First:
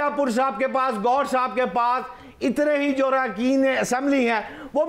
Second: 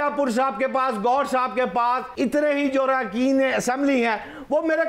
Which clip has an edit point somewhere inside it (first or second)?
second